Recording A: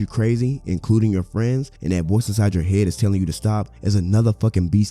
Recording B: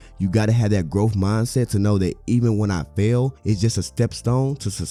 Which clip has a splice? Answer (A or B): A